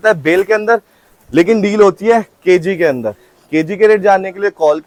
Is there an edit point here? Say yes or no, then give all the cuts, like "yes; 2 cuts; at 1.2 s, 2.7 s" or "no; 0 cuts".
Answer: no; 0 cuts